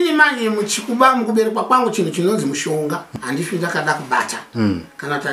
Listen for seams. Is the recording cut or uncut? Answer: cut